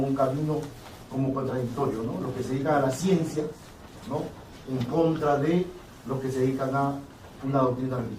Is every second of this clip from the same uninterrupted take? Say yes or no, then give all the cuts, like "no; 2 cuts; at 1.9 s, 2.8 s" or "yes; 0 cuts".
no; 1 cut; at 5.4 s